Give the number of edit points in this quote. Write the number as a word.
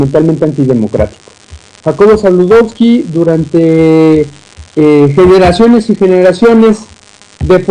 one